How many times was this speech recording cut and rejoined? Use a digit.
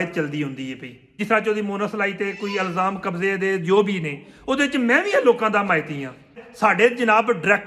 2